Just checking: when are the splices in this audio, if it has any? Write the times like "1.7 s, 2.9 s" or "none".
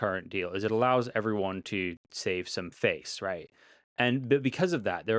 none